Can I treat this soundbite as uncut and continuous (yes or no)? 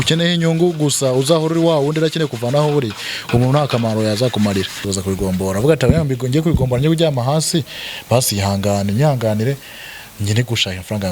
no